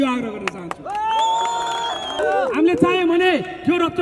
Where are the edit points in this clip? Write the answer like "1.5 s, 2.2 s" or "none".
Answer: 2.2 s

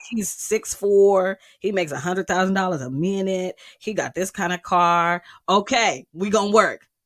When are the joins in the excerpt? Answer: 6.1 s

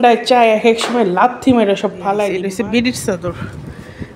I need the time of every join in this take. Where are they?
2.4 s

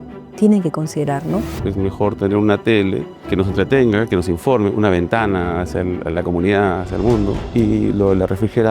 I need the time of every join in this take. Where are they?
1.5 s, 3.1 s, 7.4 s

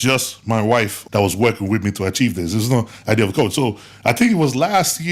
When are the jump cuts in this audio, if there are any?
1.0 s

